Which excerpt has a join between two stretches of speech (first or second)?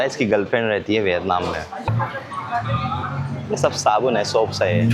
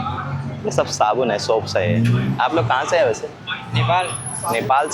first